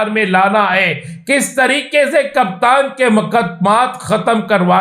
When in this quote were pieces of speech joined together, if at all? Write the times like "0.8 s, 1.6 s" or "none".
none